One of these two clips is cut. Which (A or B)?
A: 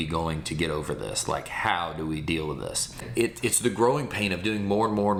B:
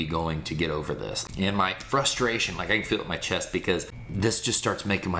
B